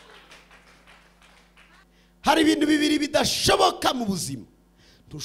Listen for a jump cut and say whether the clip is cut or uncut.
cut